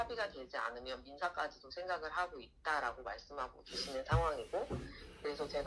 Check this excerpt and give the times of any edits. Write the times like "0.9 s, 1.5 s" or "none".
none